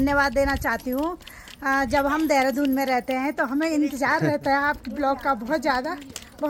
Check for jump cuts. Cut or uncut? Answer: uncut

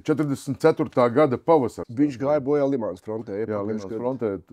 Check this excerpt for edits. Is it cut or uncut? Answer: cut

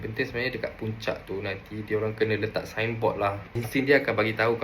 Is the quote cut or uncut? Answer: cut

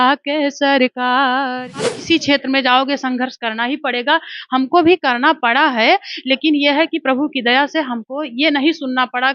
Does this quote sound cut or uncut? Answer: cut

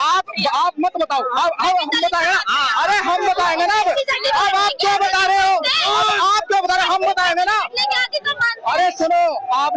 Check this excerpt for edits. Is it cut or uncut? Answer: uncut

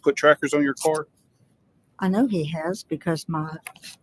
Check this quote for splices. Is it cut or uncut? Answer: uncut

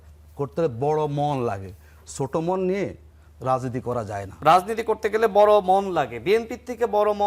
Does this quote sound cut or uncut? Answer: cut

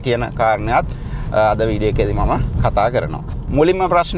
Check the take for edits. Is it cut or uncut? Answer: uncut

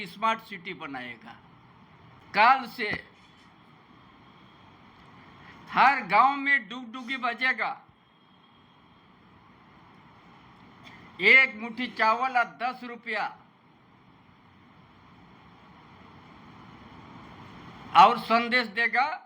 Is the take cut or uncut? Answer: cut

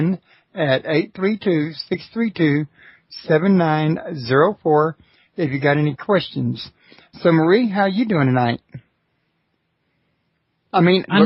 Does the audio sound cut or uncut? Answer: uncut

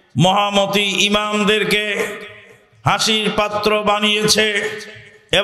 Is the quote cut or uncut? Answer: uncut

